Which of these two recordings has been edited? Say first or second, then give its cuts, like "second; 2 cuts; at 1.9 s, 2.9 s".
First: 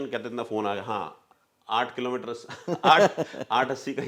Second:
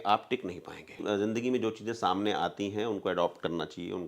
second; 1 cut; at 1.0 s